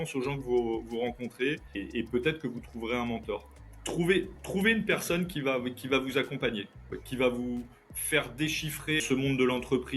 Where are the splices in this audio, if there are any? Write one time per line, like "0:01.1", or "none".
0:01.7
0:03.6
0:09.0

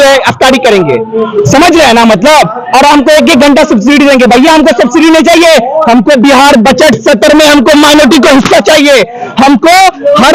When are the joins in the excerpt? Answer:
none

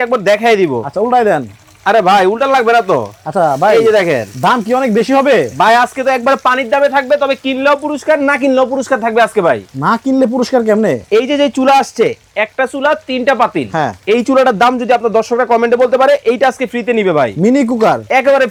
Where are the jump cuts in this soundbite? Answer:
none

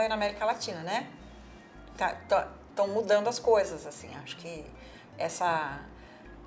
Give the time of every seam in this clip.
none

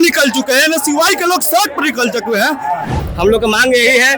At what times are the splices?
0:02.9

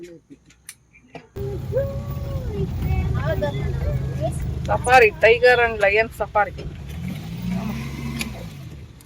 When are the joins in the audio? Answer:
0:01.3

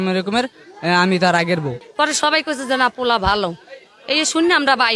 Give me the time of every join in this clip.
0:01.8

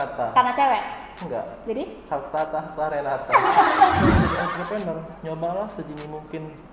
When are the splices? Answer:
0:04.0

